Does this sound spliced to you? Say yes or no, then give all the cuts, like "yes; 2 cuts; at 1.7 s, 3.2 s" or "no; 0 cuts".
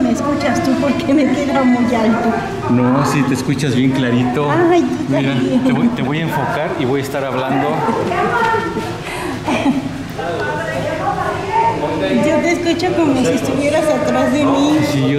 no; 0 cuts